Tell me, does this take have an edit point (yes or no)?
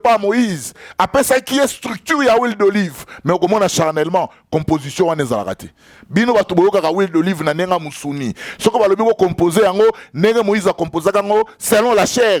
no